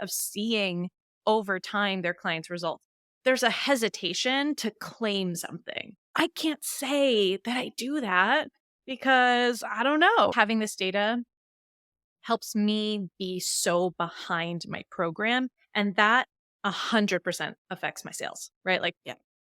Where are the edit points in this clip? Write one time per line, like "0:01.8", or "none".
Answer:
0:03.1
0:10.3